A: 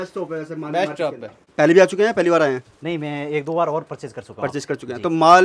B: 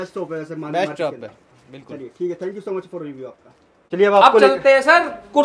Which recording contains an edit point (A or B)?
A